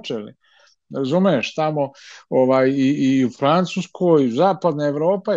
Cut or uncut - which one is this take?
uncut